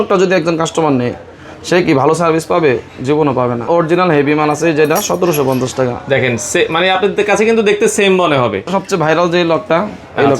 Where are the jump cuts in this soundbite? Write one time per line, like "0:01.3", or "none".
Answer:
0:03.7
0:08.7